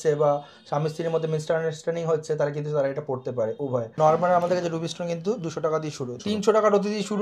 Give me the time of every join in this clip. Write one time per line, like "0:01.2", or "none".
0:03.9
0:06.2